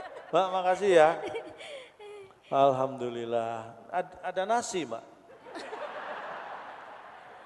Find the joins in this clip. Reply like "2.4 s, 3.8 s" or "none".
none